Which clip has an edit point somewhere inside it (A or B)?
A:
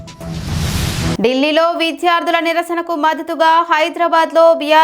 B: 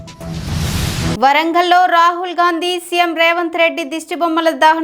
A